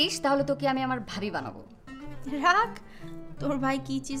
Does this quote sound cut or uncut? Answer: uncut